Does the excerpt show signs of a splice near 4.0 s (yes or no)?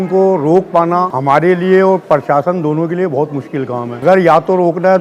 yes